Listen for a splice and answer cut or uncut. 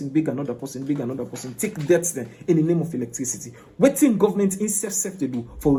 uncut